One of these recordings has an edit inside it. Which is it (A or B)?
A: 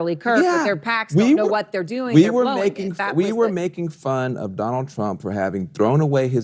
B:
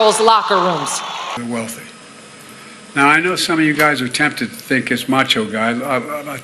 B